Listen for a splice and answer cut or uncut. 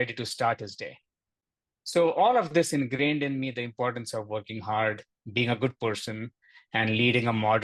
uncut